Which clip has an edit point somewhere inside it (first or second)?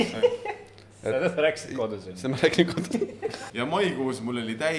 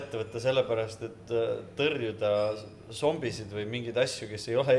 first